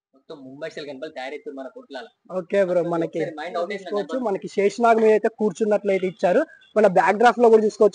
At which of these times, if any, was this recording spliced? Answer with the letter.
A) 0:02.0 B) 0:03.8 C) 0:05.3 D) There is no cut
B